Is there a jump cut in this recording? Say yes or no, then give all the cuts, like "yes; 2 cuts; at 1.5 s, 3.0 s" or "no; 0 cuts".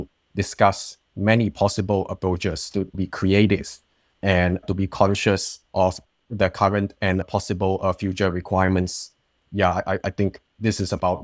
no; 0 cuts